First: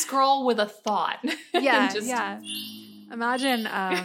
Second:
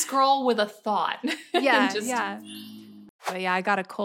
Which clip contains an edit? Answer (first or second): second